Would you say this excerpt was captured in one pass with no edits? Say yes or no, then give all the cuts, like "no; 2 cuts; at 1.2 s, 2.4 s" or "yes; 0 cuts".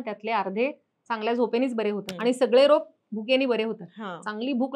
no; 1 cut; at 2.1 s